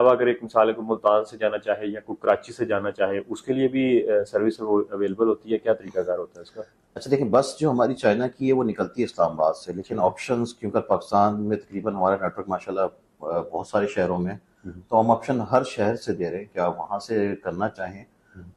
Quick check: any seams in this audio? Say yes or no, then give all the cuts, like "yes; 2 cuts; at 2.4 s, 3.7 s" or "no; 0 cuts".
no; 0 cuts